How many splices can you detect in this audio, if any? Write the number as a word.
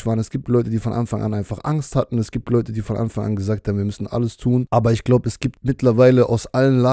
two